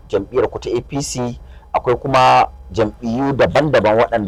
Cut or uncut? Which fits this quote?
uncut